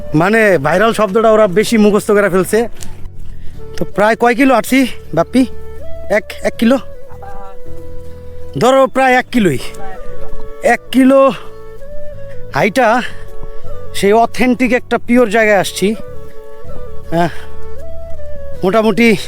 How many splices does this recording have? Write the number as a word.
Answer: one